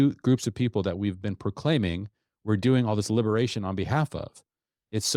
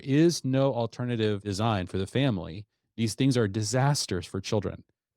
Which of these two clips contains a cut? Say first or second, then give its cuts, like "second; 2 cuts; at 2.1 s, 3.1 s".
second; 2 cuts; at 1.4 s, 2.8 s